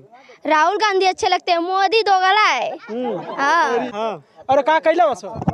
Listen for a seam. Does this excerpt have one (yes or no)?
yes